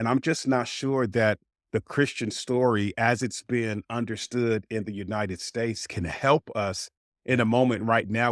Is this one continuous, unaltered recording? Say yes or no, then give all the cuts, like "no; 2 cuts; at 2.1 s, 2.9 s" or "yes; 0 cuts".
yes; 0 cuts